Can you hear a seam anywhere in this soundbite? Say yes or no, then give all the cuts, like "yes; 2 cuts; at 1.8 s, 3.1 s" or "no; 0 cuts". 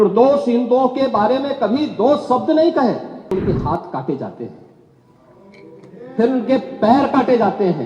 yes; 1 cut; at 3.3 s